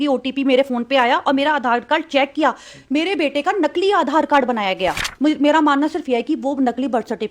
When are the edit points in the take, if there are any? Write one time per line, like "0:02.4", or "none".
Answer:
0:05.0